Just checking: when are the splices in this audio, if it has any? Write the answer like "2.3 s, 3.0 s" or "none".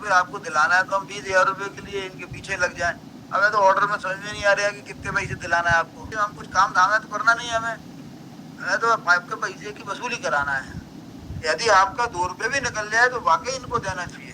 6.0 s, 11.2 s